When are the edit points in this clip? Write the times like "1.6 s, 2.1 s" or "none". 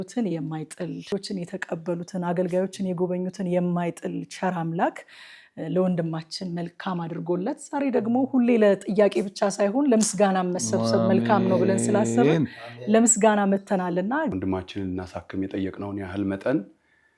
1.0 s, 14.3 s